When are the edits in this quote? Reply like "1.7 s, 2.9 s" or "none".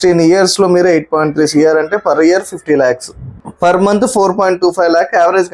3.5 s